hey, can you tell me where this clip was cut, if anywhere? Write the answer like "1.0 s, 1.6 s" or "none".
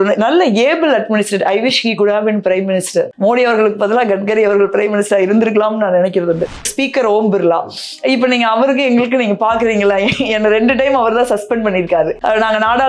3.1 s, 6.7 s